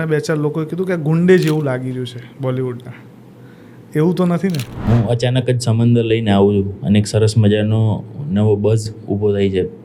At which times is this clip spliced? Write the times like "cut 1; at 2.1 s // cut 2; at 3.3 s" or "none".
cut 1; at 4.7 s